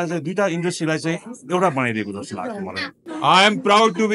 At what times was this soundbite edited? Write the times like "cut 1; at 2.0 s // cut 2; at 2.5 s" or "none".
cut 1; at 3.1 s